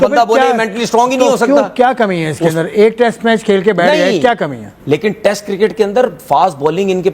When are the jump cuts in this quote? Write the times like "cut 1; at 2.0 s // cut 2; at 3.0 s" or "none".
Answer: cut 1; at 4.7 s